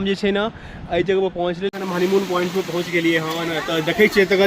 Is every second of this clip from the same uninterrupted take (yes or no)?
no